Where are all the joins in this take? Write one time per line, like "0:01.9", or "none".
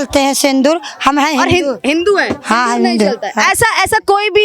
none

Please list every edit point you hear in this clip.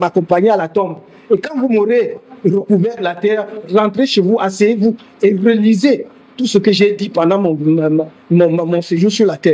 none

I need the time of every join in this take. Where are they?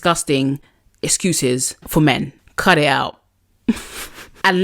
0:01.8
0:02.4

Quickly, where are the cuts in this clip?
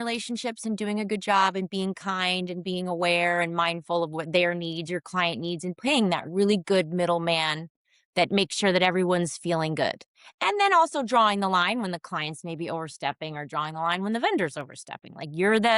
none

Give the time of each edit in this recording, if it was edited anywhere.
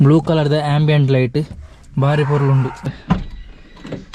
0:02.9

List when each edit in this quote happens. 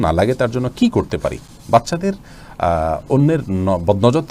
none

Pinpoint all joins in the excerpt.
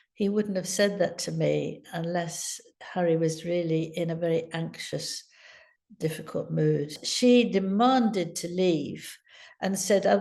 0:07.0

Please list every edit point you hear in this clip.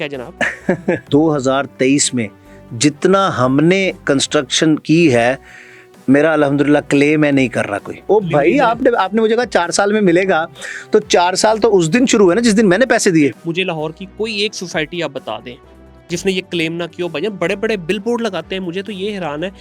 0:01.0
0:08.0
0:13.4

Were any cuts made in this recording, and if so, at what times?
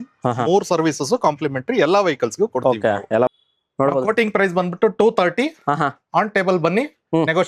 0:03.3

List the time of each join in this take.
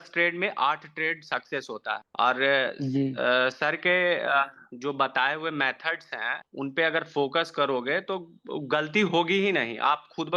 none

